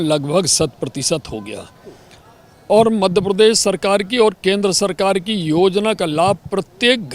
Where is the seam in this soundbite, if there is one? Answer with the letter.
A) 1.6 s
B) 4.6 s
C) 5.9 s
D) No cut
D